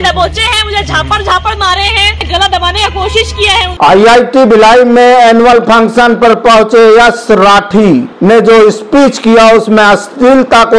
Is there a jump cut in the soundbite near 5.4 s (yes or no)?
no